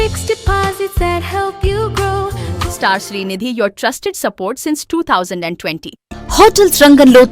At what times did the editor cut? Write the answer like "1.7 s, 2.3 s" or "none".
2.5 s, 6.0 s